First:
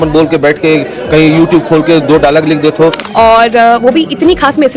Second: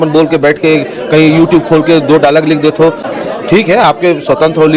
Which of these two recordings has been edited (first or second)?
first